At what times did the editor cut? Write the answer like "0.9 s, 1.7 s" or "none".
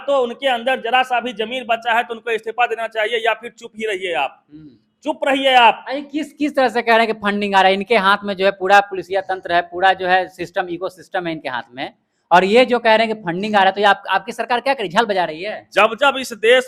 none